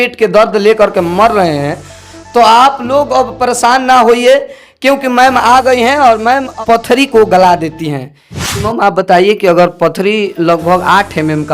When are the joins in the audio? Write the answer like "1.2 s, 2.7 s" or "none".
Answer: 6.6 s, 8.6 s